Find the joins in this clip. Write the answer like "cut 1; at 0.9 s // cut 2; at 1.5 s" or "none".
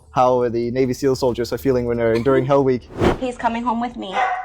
cut 1; at 3.1 s